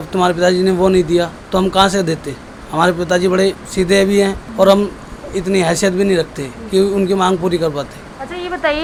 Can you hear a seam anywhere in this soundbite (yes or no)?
no